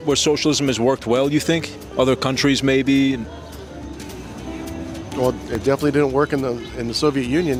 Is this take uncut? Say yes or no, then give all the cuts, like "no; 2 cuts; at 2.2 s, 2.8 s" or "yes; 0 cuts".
yes; 0 cuts